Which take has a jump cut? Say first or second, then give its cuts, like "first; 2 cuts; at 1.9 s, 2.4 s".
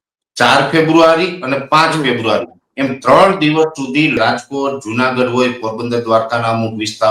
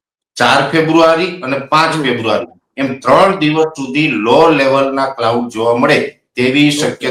first; 1 cut; at 4.2 s